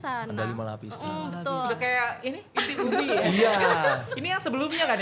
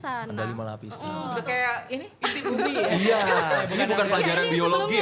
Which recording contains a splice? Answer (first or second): second